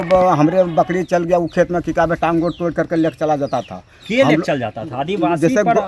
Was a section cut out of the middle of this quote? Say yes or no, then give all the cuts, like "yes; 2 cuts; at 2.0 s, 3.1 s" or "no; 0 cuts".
no; 0 cuts